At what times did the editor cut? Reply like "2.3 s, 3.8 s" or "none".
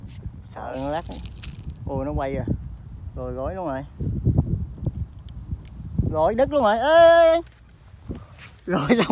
6.6 s